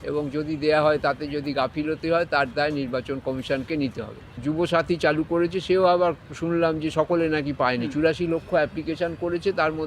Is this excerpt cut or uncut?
cut